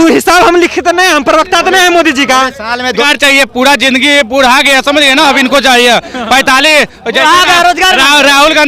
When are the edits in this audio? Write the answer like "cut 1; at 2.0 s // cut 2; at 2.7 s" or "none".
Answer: cut 1; at 3.0 s